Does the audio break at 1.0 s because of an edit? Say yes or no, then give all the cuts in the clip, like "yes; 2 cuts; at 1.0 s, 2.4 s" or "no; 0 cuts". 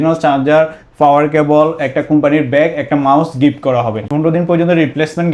no; 1 cut; at 4.0 s